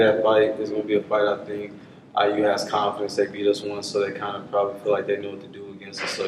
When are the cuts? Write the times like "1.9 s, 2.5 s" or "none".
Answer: none